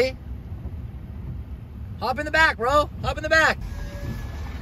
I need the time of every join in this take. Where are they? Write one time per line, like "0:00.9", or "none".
0:03.6